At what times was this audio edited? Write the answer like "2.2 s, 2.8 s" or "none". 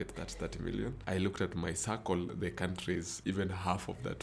1.0 s, 3.1 s